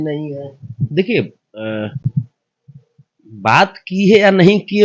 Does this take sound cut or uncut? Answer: uncut